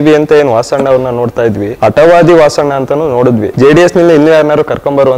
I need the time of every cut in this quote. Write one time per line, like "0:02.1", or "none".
0:01.7
0:03.5